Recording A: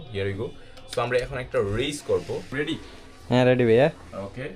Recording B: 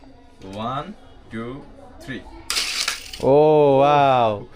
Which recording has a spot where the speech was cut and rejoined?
A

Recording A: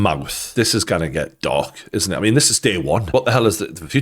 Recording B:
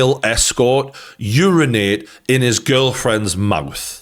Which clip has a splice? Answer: A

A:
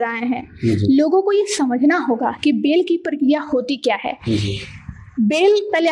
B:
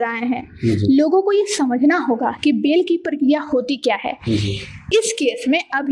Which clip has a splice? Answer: B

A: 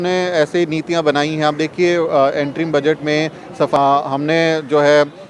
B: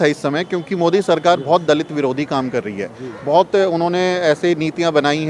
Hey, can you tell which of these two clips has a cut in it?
A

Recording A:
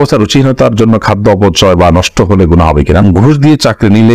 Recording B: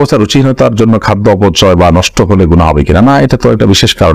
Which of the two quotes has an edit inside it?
A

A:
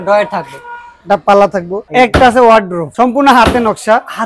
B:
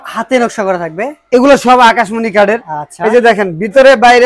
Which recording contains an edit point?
A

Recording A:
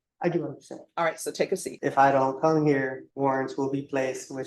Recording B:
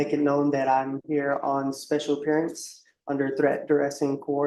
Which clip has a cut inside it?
A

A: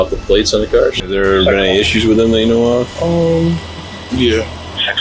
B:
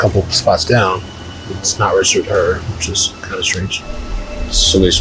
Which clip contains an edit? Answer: A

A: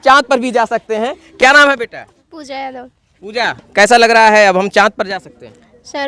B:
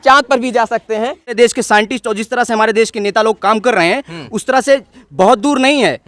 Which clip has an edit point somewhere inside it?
B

